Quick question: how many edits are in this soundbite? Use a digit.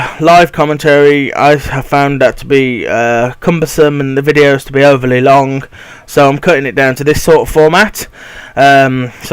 1